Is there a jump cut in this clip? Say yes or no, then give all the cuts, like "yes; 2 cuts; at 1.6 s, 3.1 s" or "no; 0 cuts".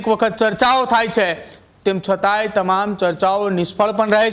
no; 0 cuts